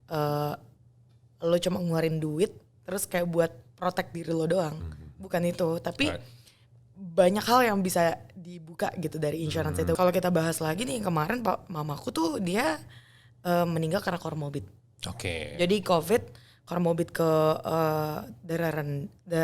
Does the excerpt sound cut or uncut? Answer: cut